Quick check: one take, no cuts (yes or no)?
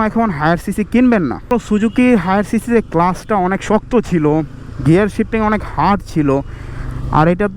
no